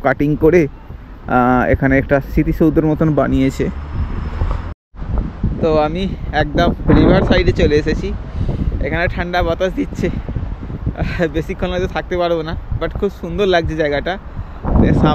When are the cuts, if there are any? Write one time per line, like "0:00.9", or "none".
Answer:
0:04.8